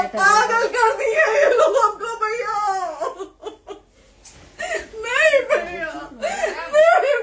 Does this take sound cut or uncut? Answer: uncut